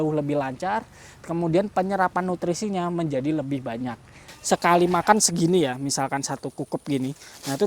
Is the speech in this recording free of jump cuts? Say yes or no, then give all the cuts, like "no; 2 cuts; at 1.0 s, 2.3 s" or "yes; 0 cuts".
no; 1 cut; at 4.2 s